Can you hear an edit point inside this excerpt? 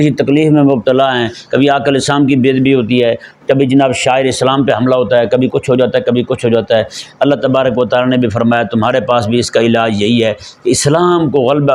no; 0 cuts

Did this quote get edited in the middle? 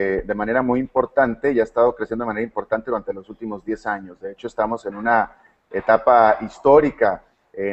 yes; 1 cut; at 5.3 s

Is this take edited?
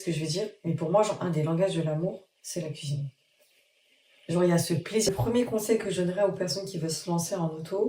yes; 1 cut; at 5.1 s

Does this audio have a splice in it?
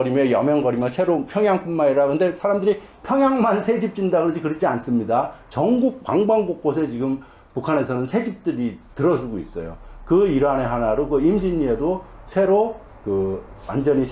no; 0 cuts

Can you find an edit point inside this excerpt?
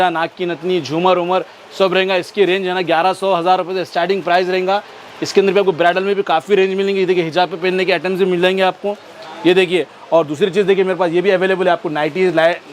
no; 0 cuts

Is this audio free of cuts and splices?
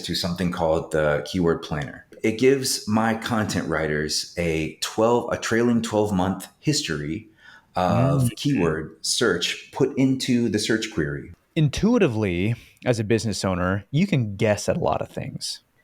no; 2 cuts; at 2.1 s, 11.3 s

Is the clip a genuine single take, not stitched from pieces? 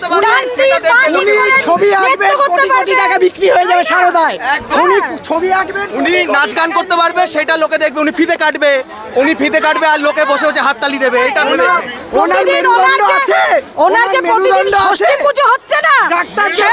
yes; 0 cuts

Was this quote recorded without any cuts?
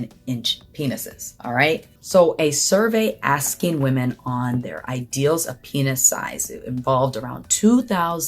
no; 1 cut; at 1.9 s

